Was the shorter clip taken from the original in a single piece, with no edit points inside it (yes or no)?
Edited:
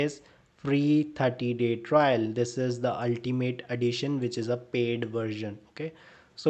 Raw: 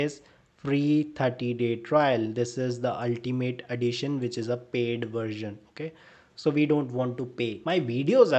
yes